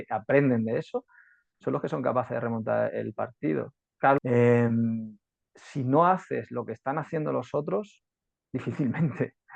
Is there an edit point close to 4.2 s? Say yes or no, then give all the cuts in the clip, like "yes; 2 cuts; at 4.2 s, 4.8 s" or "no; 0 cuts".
yes; 1 cut; at 4.2 s